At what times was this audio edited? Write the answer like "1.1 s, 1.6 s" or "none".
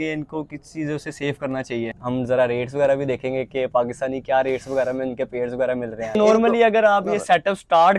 2.0 s, 6.1 s